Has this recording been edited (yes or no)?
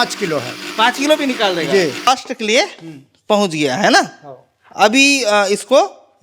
yes